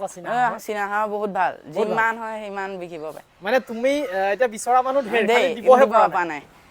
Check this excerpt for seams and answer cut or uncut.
uncut